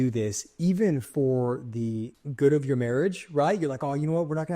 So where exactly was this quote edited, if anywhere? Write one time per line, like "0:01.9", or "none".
0:02.2